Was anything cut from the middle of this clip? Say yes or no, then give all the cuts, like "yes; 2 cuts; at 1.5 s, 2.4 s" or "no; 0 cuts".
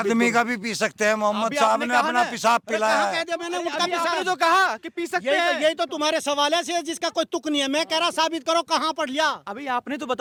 no; 0 cuts